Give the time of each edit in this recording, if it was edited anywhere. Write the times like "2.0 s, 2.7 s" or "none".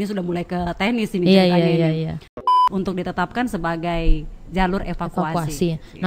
2.5 s